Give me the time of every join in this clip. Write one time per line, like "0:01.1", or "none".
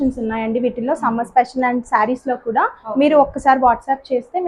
none